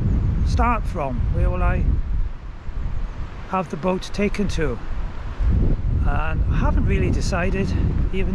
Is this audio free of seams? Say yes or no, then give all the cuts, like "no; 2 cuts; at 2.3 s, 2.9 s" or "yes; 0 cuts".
yes; 0 cuts